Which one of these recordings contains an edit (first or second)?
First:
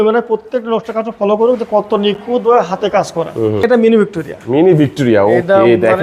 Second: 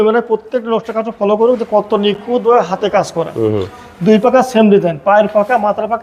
first